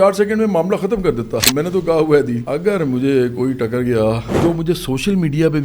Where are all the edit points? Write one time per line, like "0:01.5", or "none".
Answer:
0:01.5
0:02.4
0:04.3